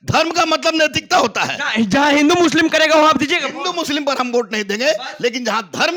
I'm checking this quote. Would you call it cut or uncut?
uncut